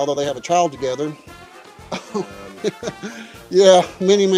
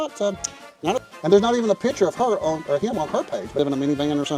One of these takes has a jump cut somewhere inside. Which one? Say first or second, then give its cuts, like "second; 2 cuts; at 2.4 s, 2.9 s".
second; 2 cuts; at 0.9 s, 3.6 s